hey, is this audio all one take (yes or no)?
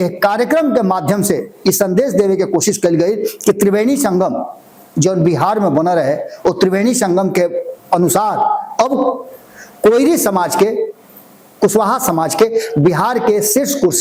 yes